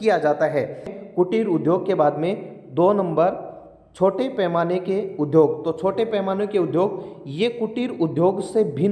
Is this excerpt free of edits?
no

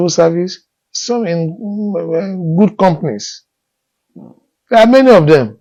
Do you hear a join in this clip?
no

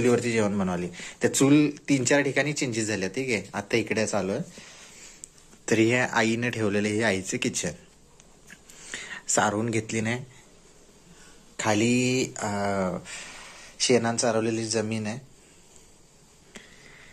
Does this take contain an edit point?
no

